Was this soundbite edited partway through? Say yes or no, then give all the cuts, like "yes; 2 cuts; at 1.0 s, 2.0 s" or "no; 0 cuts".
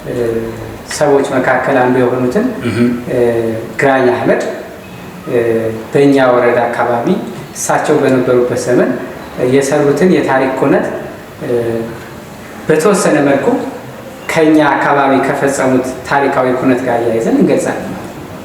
no; 0 cuts